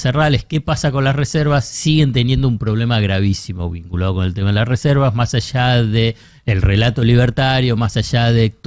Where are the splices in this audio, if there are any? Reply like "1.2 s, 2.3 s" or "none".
none